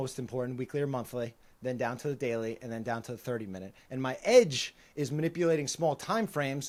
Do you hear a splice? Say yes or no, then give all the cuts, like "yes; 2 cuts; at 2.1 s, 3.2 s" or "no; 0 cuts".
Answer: no; 0 cuts